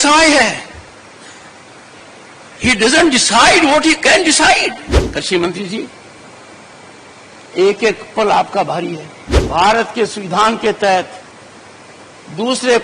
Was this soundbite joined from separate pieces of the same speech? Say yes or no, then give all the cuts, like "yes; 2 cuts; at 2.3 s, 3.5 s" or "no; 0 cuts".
yes; 2 cuts; at 4.9 s, 9.4 s